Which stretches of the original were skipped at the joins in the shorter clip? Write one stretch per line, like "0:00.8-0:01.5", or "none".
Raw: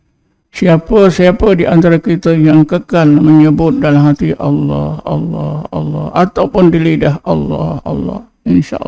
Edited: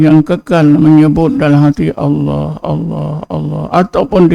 none

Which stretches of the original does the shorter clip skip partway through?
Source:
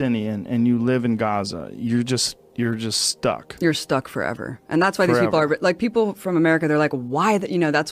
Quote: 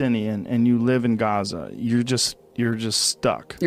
none

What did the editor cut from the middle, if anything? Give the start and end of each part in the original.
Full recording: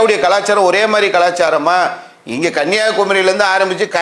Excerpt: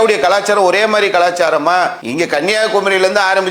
0:02.0-0:02.3

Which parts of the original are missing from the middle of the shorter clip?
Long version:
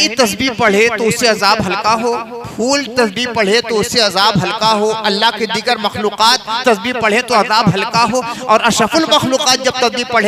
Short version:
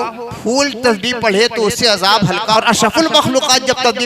0:04.7-0:08.5

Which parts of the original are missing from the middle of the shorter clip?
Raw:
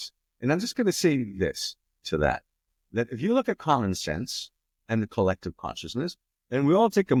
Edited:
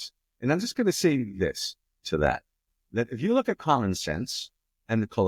none

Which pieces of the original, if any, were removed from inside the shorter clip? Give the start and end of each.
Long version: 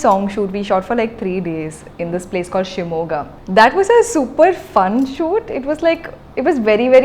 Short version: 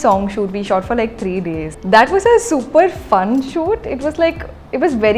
0:01.7-0:03.4

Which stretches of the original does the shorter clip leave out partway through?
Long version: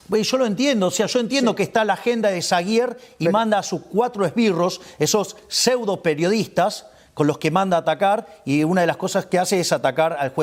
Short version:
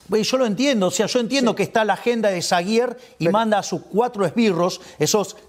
none

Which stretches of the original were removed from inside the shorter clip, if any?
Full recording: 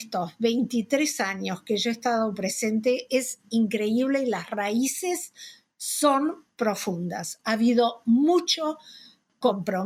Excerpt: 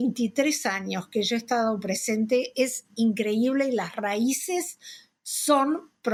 none

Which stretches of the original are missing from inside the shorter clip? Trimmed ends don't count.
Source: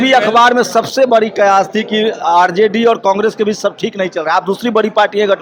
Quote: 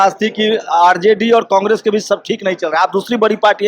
none

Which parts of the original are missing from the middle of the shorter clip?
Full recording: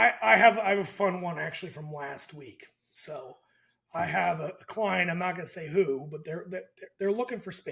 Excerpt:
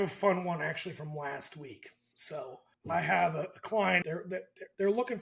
0:03.5-0:03.7
0:05.1-0:06.2

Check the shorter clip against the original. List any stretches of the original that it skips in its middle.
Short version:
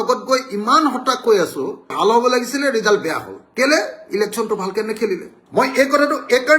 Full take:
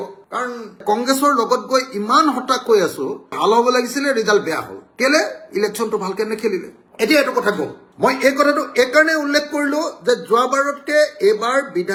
0:06.8-0:07.8

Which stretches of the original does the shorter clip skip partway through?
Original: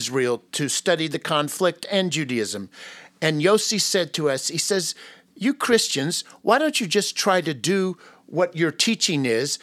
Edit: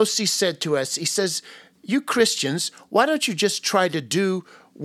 none

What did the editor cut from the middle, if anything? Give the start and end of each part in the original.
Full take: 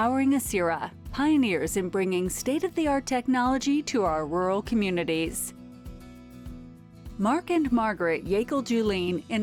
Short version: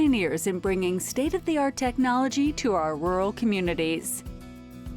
0:05.3-0:05.6

